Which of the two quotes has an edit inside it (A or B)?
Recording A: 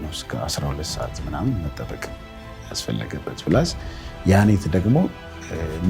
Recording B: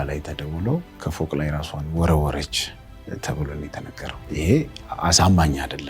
B